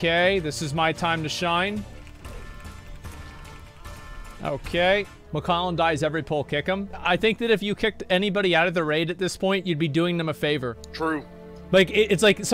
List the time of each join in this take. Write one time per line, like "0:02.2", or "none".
0:02.0
0:05.2
0:06.9
0:10.8